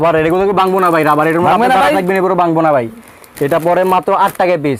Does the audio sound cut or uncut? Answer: uncut